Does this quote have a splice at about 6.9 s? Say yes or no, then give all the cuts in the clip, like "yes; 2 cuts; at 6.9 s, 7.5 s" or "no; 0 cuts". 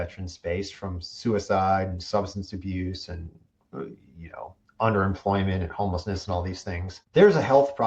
yes; 1 cut; at 6.9 s